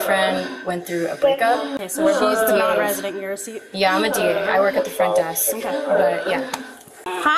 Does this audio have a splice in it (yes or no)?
no